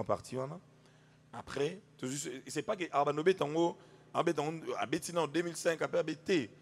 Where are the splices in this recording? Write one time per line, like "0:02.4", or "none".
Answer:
none